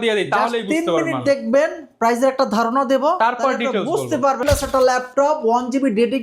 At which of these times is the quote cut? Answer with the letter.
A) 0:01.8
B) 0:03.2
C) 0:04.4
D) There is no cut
C